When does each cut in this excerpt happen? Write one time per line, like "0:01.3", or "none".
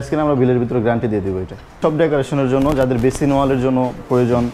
0:01.7